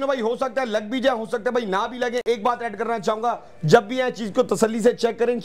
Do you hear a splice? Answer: no; 0 cuts

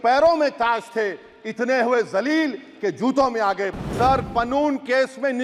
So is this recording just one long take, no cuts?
no; 1 cut; at 3.7 s

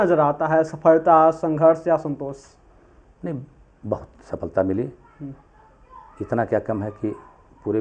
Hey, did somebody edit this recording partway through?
no; 0 cuts

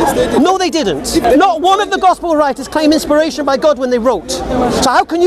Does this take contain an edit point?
yes; 1 cut; at 1.2 s

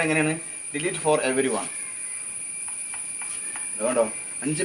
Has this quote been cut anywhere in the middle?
yes; 1 cut; at 3.8 s

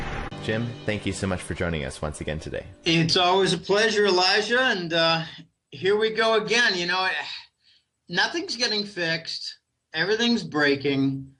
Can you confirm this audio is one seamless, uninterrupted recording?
yes; 0 cuts

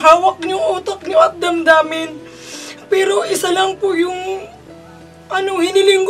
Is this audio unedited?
yes; 0 cuts

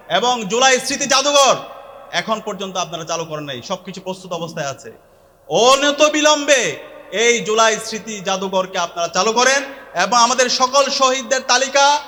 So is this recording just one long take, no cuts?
yes; 0 cuts

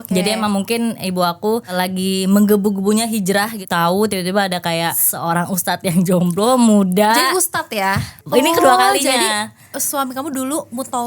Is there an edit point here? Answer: yes; 4 cuts; at 1.7 s, 3.6 s, 5.1 s, 8.1 s

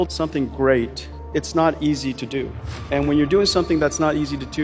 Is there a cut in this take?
yes; 1 cut; at 1.2 s

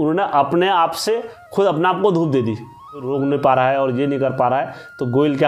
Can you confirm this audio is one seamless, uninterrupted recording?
no; 1 cut; at 3.1 s

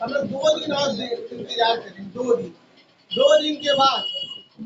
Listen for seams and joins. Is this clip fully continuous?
yes; 0 cuts

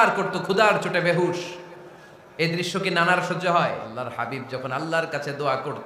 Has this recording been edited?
yes; 1 cut; at 4.1 s

